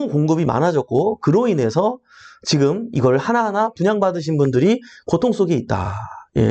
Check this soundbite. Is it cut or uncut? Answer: uncut